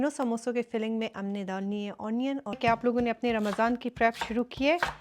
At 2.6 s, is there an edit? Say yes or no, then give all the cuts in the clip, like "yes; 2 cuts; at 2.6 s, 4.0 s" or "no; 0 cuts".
yes; 1 cut; at 2.6 s